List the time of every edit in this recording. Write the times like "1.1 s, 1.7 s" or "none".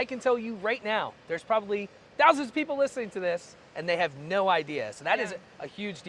2.0 s